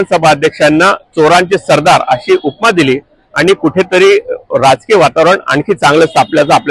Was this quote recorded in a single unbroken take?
yes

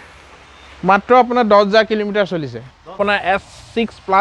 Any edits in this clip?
yes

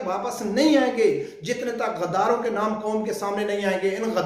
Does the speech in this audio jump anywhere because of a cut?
no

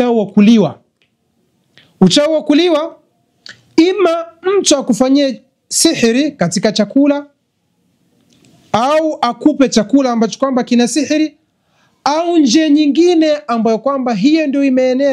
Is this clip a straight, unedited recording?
yes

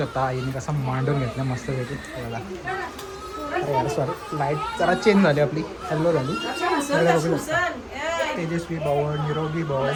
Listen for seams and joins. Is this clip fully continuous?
yes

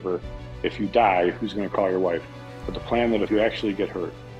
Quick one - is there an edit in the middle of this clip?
yes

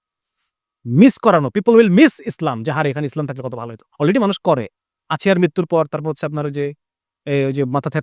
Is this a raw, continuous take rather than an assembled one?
yes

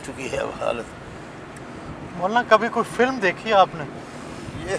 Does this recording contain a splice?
no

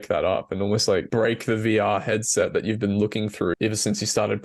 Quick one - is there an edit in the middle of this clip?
yes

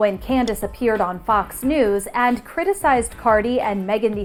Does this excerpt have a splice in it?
no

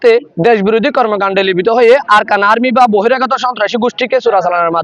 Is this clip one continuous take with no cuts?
yes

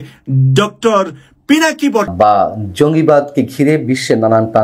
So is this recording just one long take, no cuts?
no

